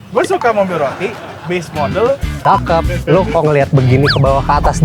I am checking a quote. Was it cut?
yes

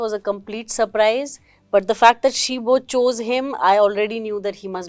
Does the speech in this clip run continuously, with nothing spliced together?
yes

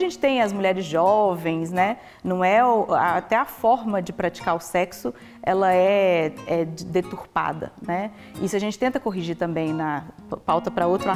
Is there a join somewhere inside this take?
no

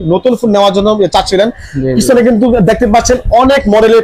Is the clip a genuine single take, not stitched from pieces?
yes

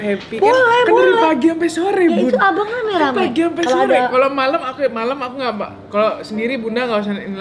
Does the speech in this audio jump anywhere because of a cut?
no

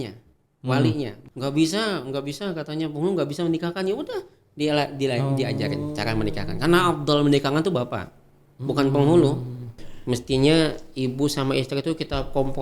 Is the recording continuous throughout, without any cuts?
no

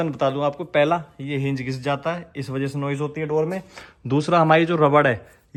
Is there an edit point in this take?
no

